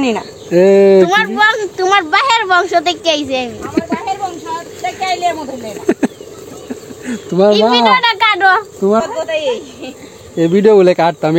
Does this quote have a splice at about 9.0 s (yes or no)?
yes